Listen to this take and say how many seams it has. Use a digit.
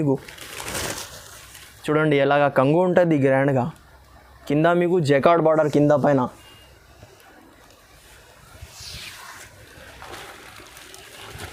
0